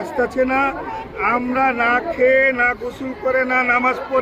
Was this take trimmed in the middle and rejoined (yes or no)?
no